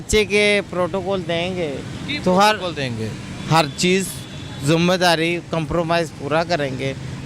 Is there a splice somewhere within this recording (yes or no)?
no